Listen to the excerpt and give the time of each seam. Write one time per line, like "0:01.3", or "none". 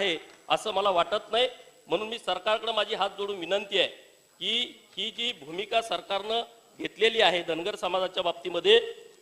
none